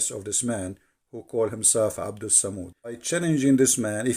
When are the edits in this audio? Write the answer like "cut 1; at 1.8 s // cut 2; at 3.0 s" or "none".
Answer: cut 1; at 3.0 s